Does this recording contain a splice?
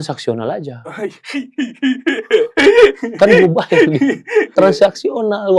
yes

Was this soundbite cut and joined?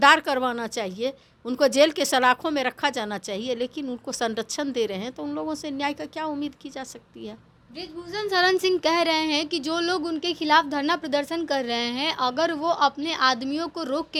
no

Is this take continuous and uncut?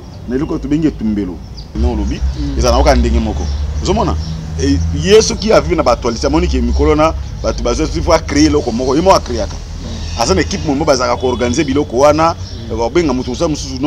no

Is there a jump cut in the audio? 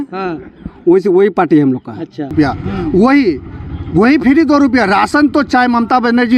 yes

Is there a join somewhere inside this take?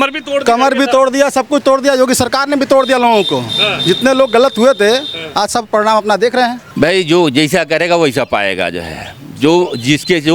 yes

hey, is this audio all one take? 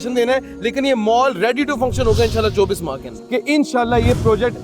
no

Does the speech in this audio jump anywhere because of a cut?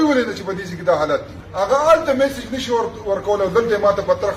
yes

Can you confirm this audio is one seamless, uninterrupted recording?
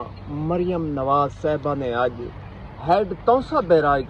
yes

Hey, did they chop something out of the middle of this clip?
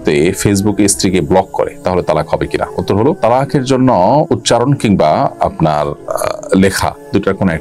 no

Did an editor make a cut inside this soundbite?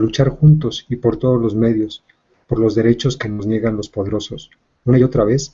no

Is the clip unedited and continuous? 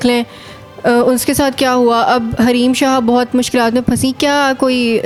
yes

